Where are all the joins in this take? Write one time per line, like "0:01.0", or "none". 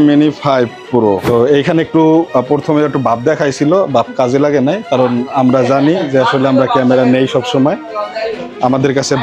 0:01.2